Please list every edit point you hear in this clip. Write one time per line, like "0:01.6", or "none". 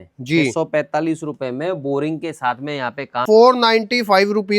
0:03.2